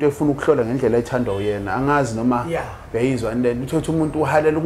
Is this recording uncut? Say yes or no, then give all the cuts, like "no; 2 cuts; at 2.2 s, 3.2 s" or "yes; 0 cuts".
yes; 0 cuts